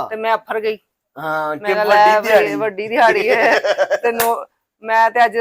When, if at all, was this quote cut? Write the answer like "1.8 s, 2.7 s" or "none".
none